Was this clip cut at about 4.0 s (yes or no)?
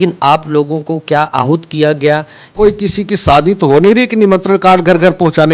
no